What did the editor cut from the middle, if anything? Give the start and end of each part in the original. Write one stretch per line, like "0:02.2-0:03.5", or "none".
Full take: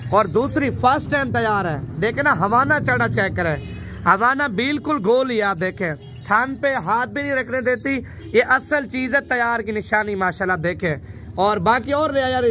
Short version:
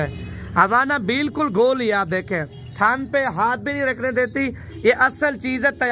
none